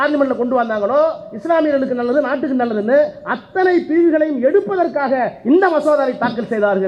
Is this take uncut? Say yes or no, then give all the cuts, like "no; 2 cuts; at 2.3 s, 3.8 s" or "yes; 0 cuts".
yes; 0 cuts